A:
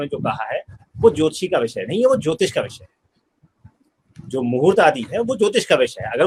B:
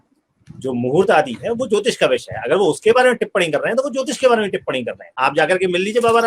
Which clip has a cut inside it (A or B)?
B